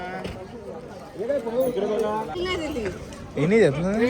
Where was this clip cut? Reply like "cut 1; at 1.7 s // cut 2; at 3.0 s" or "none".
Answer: cut 1; at 2.3 s